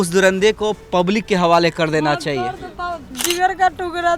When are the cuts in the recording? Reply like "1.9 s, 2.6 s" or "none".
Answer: 3.1 s